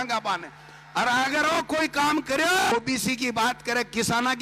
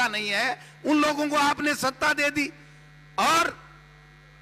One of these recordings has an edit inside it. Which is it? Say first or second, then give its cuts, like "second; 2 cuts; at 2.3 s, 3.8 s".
first; 1 cut; at 2.7 s